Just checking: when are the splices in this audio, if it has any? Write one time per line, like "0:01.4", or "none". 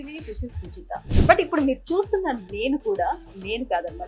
0:01.1